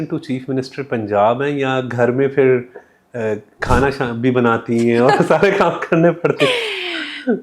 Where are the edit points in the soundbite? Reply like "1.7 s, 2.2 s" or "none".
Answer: none